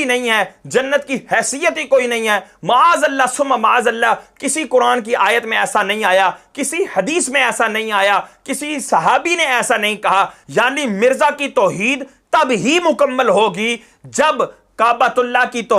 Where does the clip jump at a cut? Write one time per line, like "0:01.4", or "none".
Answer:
0:10.4

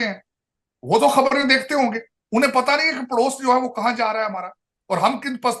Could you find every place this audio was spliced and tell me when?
none

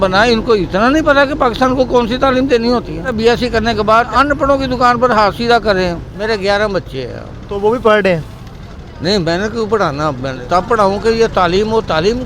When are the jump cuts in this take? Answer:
0:03.1
0:04.1
0:06.1
0:10.4

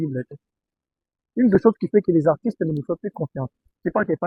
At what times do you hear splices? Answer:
none

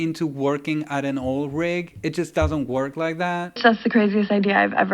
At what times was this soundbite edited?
none

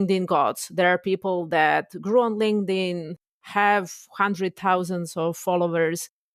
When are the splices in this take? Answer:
none

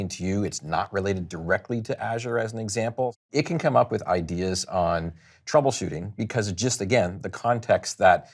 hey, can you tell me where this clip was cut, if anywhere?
0:03.3

